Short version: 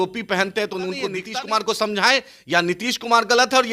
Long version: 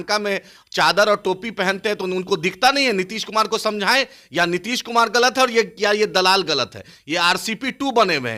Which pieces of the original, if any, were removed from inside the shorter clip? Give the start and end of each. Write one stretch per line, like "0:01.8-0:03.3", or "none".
0:02.5-0:03.1